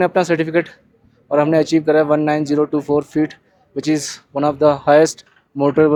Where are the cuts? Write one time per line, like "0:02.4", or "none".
none